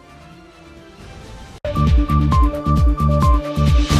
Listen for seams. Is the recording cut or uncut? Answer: uncut